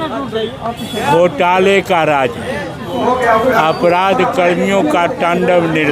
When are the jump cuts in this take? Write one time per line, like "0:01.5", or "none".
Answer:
none